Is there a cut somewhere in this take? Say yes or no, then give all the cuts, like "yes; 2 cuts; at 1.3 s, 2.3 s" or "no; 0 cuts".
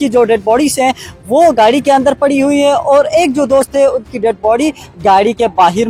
no; 0 cuts